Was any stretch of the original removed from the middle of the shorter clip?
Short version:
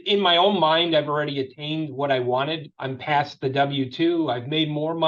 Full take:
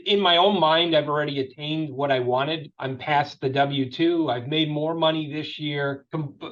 no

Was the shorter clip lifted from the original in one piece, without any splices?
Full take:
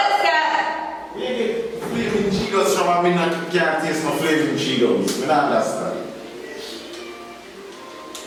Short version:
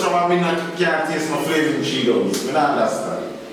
yes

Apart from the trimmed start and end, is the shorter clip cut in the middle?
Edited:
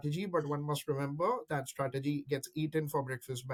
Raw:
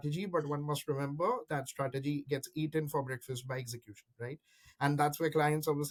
no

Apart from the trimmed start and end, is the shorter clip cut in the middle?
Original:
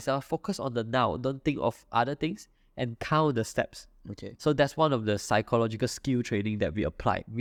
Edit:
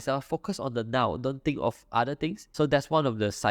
yes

